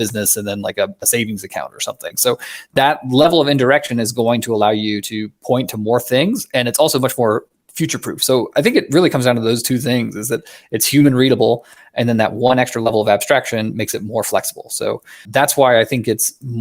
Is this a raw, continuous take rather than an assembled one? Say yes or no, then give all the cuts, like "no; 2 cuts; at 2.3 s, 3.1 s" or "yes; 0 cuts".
no; 2 cuts; at 7.5 s, 15.2 s